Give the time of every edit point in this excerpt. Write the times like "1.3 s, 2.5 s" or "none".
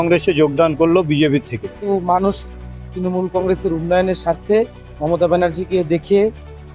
1.8 s